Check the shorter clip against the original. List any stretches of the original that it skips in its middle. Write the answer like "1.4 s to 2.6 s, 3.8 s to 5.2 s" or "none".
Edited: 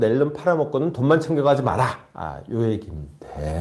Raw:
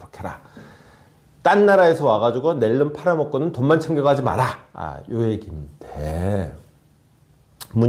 none